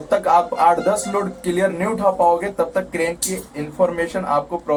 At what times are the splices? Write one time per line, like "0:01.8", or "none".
none